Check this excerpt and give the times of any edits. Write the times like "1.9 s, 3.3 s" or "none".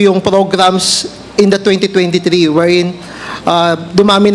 none